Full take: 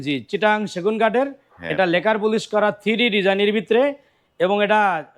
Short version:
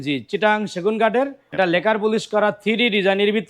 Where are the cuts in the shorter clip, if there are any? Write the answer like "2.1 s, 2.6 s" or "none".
1.4 s